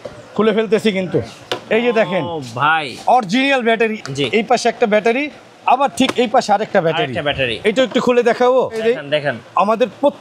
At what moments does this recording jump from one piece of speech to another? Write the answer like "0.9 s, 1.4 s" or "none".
4.0 s, 8.8 s